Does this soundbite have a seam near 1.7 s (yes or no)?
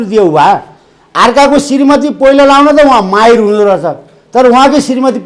no